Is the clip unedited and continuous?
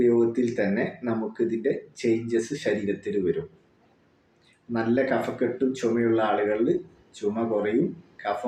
yes; 0 cuts

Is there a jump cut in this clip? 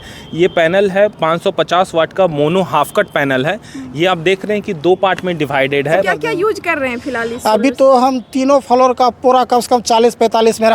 yes; 1 cut; at 6.1 s

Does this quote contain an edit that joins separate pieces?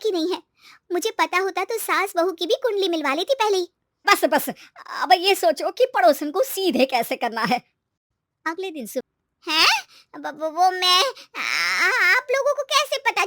yes; 2 cuts; at 4.0 s, 9.1 s

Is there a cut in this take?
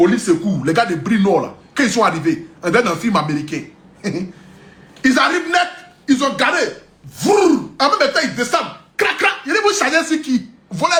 no; 0 cuts

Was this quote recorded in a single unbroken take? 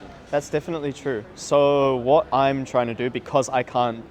yes; 0 cuts

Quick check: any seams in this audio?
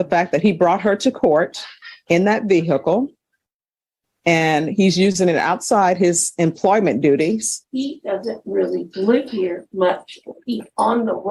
no; 0 cuts

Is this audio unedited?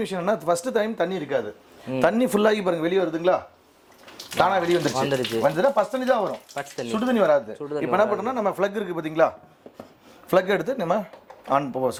yes; 0 cuts

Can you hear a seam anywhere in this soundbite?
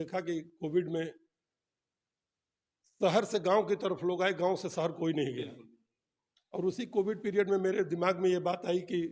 no; 0 cuts

